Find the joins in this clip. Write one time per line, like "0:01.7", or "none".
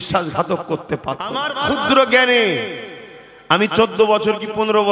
0:01.5